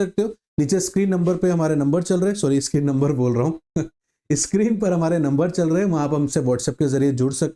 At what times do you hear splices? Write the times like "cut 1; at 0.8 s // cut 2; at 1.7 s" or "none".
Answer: none